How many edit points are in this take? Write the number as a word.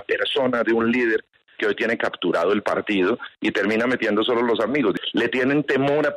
one